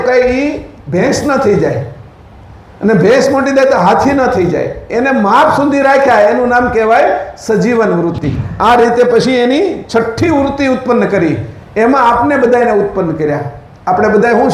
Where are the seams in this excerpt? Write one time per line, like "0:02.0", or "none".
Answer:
0:08.4